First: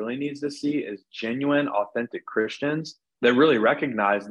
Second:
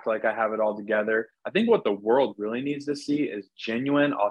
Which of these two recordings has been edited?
first; 1 cut; at 3.0 s

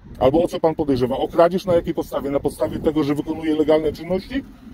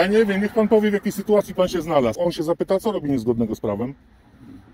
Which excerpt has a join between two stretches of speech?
second; 1 cut; at 2.1 s

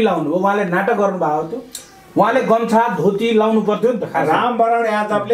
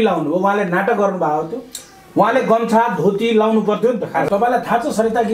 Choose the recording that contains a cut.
second; 1 cut; at 4.3 s

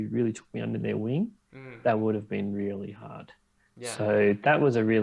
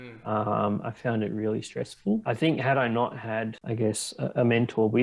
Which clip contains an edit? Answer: second; 2 cuts; at 2.2 s, 3.6 s

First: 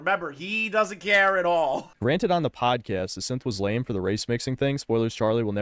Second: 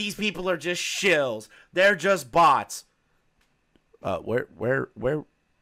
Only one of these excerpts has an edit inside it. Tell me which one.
first; 1 cut; at 1.9 s

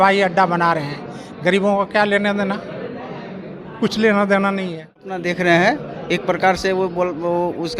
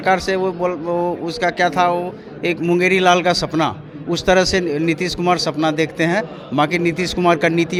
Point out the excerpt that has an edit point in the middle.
first; 1 cut; at 5.2 s

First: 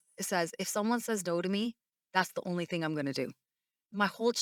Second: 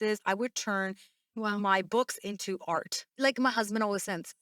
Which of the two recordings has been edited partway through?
second; 1 cut; at 3.0 s

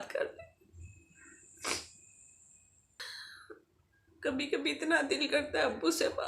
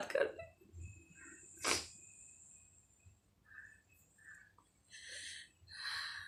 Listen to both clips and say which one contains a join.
first; 1 cut; at 3.0 s

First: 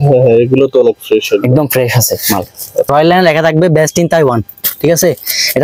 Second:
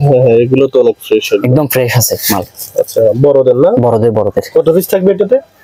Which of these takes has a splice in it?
first; 1 cut; at 2.9 s

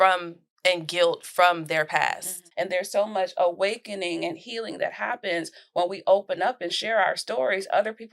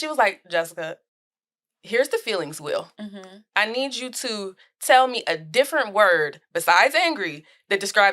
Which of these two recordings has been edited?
first; 1 cut; at 2.4 s

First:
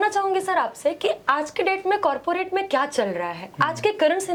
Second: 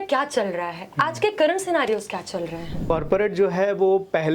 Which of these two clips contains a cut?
second; 1 cut; at 2.9 s

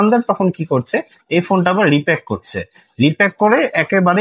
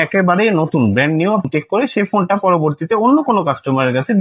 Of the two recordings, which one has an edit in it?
second; 1 cut; at 1.5 s

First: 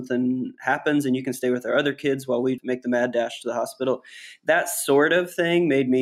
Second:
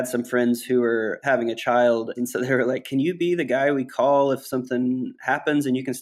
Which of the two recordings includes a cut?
second; 2 cuts; at 1.2 s, 2.1 s

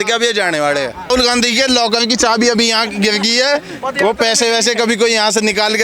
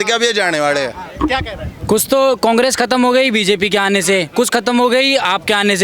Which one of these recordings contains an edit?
first; 1 cut; at 1.1 s

